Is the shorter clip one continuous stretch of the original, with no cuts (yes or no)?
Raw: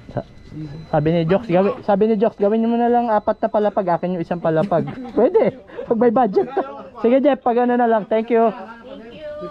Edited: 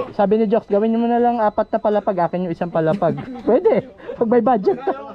yes